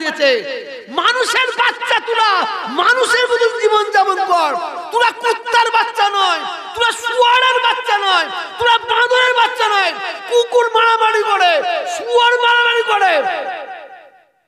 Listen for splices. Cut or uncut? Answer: uncut